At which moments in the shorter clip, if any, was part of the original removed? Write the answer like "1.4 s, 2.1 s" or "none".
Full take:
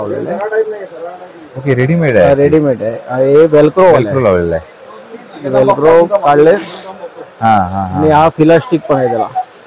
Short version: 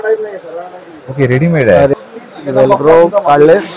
1.9 s